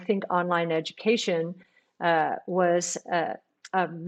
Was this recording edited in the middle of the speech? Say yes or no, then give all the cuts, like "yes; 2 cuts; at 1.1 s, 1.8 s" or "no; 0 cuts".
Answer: no; 0 cuts